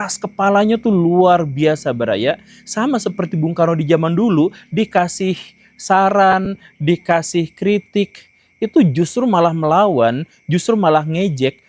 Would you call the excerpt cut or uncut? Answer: uncut